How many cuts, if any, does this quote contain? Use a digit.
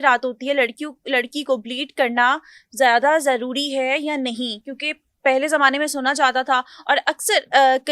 0